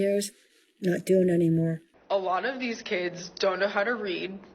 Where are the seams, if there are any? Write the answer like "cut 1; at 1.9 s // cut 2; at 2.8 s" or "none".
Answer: cut 1; at 1.9 s